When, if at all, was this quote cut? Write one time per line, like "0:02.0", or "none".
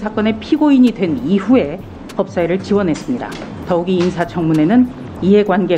0:03.5